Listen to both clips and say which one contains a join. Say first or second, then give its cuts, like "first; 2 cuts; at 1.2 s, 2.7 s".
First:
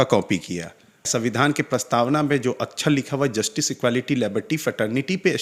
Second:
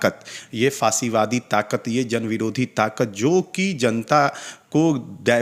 first; 1 cut; at 1.1 s